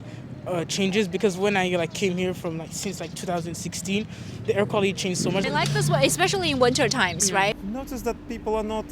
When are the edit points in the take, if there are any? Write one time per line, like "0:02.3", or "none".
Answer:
none